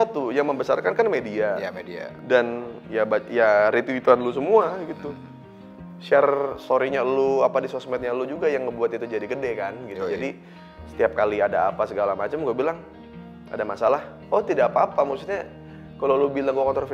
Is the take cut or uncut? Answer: uncut